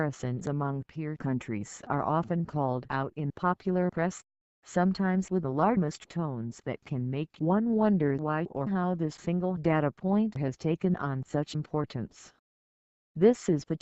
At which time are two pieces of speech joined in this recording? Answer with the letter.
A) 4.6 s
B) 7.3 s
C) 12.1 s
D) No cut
C